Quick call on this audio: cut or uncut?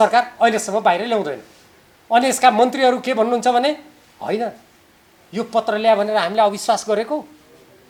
uncut